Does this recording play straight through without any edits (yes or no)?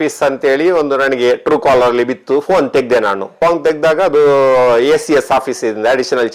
yes